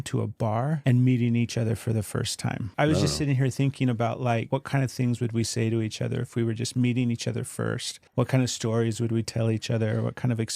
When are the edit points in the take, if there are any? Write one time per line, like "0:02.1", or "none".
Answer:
0:00.8
0:02.7
0:04.5
0:07.9